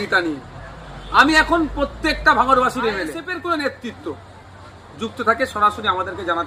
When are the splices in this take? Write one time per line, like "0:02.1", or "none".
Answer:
0:03.2